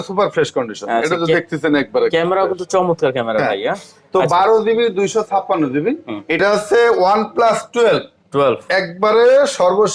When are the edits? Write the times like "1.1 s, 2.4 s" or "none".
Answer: 6.4 s